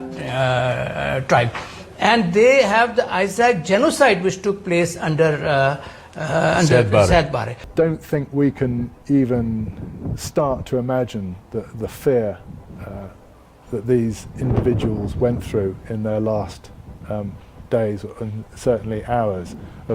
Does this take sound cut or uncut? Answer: cut